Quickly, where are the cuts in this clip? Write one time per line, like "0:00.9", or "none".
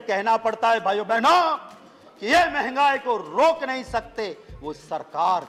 none